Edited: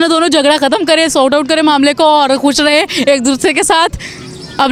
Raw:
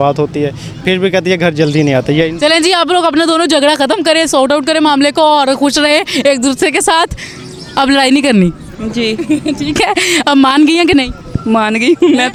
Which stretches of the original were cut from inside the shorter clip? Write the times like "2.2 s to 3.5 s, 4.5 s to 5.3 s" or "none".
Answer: none